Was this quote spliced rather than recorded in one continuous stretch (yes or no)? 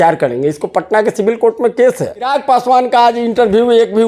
yes